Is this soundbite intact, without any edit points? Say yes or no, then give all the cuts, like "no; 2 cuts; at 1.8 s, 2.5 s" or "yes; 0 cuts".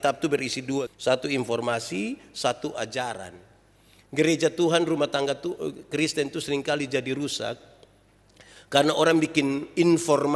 no; 1 cut; at 0.9 s